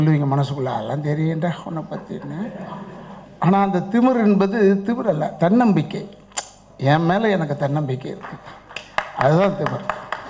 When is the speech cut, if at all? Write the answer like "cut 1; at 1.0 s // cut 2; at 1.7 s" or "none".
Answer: none